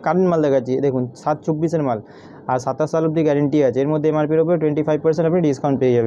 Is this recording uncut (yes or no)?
yes